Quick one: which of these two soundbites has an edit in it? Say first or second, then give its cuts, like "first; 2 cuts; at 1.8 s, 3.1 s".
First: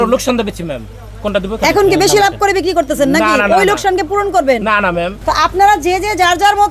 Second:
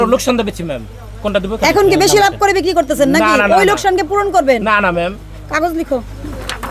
first; 1 cut; at 5.1 s